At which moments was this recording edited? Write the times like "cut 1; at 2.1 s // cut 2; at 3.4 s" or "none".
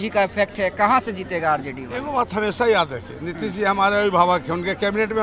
none